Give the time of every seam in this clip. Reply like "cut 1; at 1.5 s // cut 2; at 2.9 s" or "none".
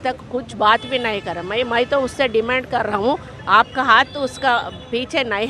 none